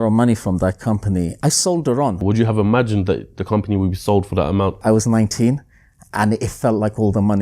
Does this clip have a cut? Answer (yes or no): yes